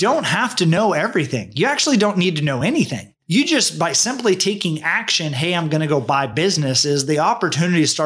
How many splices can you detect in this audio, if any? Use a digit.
0